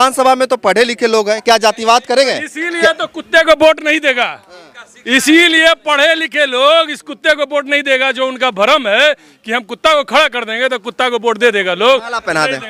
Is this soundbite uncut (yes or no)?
yes